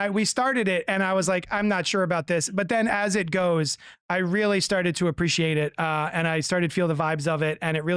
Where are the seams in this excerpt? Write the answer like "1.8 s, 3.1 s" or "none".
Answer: none